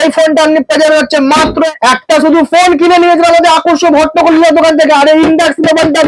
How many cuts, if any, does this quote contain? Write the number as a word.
one